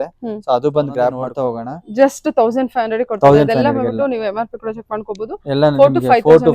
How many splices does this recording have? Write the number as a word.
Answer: one